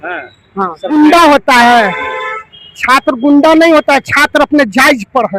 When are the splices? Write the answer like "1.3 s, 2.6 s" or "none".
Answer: 0.9 s